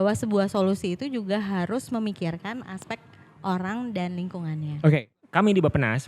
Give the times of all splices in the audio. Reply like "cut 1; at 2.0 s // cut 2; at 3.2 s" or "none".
cut 1; at 5.1 s